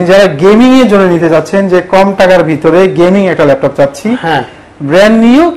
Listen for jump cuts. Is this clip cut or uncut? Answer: uncut